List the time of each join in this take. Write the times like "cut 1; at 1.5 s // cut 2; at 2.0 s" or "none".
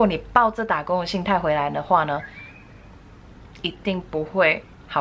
none